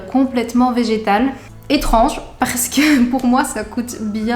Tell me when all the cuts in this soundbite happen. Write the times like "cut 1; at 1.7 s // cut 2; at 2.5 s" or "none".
cut 1; at 1.5 s